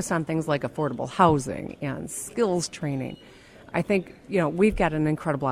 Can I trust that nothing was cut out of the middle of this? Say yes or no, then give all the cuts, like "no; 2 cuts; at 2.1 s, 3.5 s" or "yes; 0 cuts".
no; 1 cut; at 3.7 s